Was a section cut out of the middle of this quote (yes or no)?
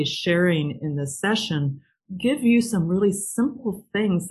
no